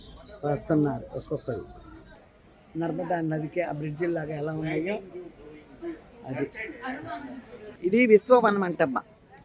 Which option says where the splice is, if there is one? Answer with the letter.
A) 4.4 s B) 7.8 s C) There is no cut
B